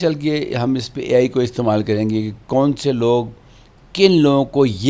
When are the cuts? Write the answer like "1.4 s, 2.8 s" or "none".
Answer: none